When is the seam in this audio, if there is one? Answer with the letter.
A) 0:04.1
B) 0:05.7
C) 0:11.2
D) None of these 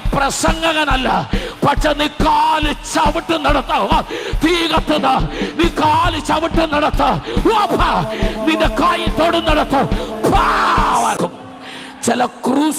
C